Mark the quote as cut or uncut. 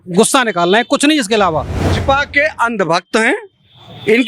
cut